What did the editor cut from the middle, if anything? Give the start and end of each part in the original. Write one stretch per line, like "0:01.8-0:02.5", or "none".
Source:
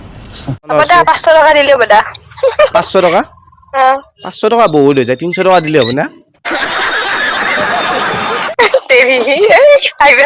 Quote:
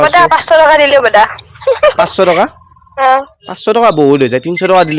none

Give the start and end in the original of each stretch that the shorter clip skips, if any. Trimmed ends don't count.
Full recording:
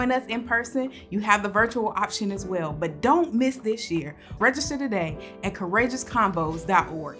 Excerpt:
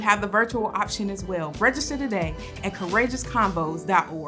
0:02.7-0:04.3

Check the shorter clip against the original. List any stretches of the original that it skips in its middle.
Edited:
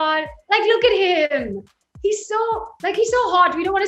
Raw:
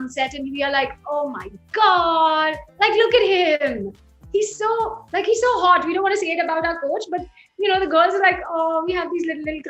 none

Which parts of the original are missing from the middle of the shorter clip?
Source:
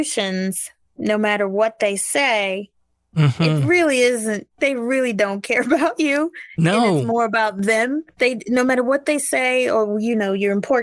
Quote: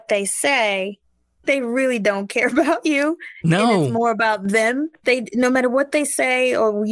0:03.0-0:04.5

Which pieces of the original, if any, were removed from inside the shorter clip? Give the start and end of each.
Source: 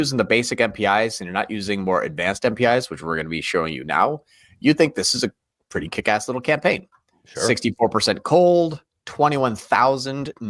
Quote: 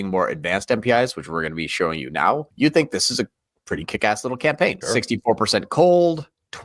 0:04.2-0:04.5
0:06.8-0:07.3

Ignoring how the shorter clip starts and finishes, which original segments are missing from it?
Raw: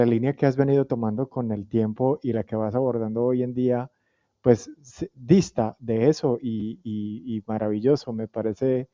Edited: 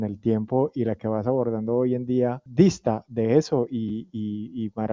0:03.9-0:05.2

